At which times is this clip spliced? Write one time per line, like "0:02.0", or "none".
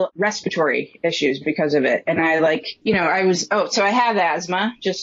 0:02.7

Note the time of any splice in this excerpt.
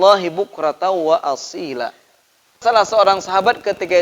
0:02.6

